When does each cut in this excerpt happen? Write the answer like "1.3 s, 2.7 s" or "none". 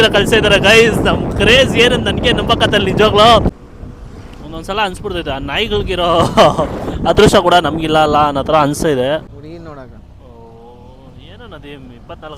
3.5 s, 9.3 s